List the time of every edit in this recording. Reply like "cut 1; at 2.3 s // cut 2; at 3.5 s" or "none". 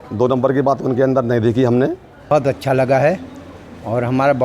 cut 1; at 2.3 s